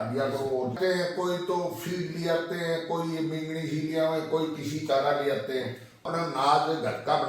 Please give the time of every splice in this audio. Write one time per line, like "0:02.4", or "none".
0:00.8
0:06.1

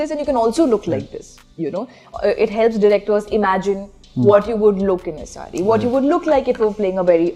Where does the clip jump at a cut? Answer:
none

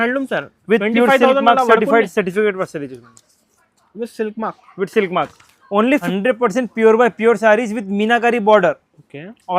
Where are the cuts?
0:06.1

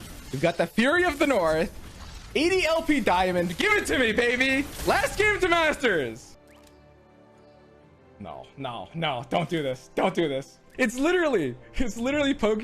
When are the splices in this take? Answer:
0:06.3
0:10.6

